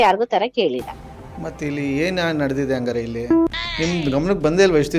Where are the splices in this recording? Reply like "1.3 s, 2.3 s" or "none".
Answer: 3.5 s

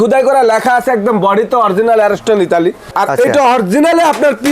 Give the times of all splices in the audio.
2.9 s

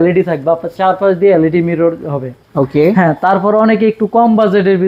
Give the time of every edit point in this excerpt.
none

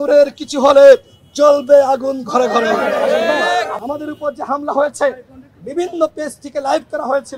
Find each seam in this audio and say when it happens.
3.7 s

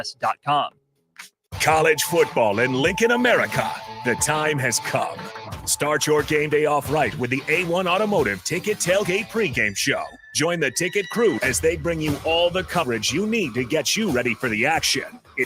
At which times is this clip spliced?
1.4 s

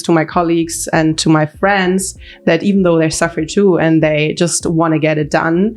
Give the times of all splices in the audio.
none

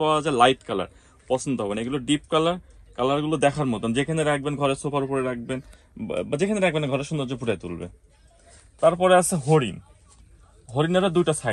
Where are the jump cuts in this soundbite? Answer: none

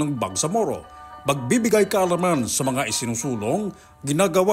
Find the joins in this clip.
none

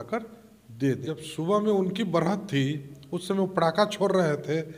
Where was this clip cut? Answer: 1.0 s

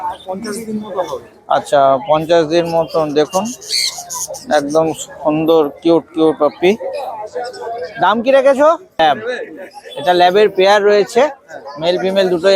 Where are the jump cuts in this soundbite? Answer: 9.0 s

